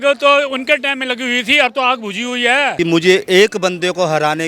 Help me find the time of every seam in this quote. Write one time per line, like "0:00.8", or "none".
0:02.8

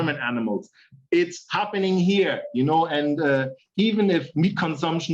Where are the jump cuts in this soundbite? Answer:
0:03.6

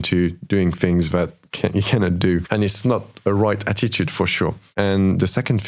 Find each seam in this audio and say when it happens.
0:02.4
0:04.6

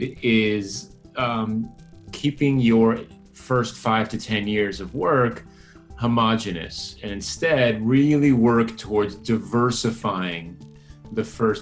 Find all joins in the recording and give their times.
none

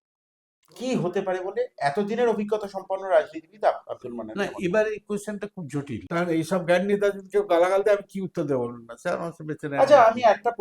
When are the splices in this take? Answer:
0:06.0

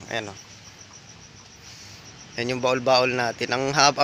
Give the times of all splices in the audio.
none

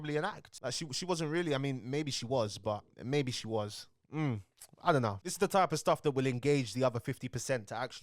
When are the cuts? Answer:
none

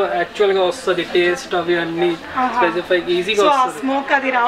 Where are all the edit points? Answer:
none

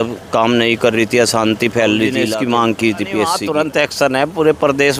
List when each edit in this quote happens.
0:02.2
0:03.4

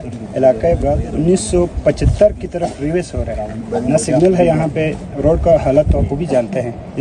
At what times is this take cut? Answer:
0:01.0
0:06.0

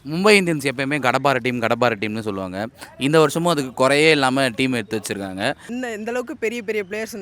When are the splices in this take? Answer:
0:05.6

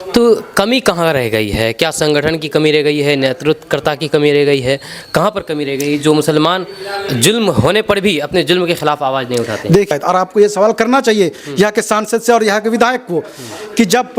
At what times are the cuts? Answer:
0:09.9

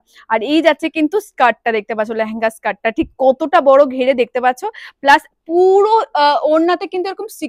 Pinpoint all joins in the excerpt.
none

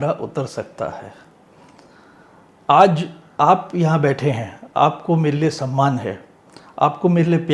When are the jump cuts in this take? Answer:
none

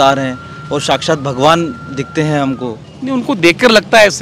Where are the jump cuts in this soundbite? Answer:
0:02.9

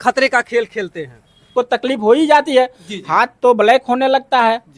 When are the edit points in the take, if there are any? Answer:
0:01.5

